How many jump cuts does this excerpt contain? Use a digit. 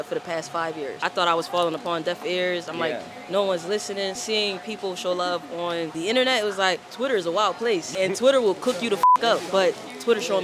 5